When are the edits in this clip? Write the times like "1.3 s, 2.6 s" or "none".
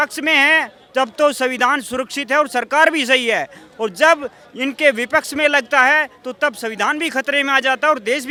none